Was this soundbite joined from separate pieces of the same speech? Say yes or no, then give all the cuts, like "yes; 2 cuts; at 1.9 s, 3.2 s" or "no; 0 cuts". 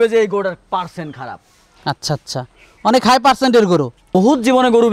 yes; 1 cut; at 4.0 s